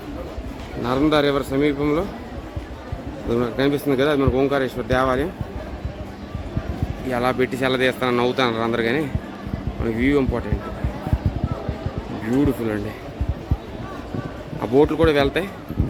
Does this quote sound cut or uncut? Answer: uncut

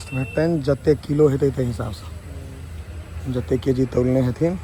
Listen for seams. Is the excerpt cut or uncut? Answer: uncut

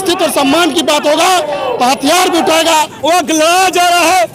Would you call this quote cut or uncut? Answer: cut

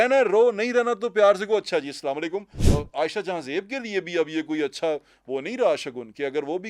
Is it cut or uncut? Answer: cut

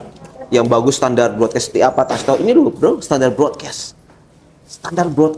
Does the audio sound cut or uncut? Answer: uncut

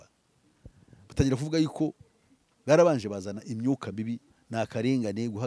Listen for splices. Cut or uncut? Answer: cut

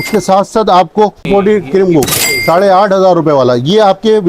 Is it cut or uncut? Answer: cut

